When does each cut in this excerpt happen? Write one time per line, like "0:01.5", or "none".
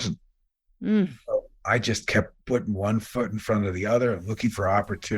0:02.4